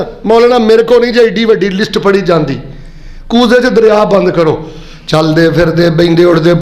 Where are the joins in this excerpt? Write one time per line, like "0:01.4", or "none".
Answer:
none